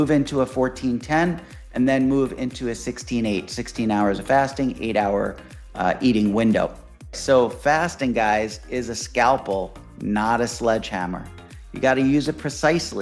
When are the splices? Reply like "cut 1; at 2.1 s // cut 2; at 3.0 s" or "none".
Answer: cut 1; at 7.2 s